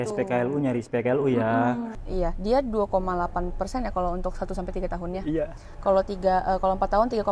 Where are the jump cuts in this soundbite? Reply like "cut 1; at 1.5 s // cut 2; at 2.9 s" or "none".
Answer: cut 1; at 1.9 s